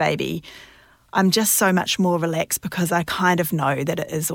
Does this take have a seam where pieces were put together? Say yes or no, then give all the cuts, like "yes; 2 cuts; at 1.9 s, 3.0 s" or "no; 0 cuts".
no; 0 cuts